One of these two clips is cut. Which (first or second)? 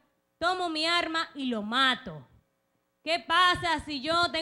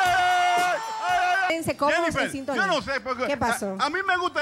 second